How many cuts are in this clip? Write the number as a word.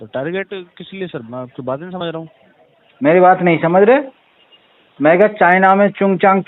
zero